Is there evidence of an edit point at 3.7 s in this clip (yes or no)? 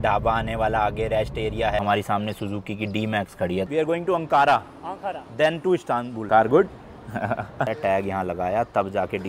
yes